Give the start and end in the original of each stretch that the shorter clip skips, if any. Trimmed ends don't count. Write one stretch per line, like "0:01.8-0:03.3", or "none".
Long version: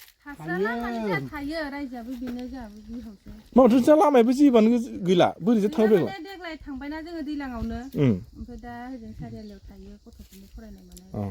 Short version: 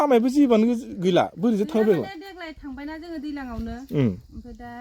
none